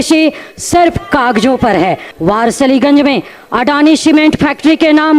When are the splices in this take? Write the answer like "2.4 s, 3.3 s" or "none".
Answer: 2.1 s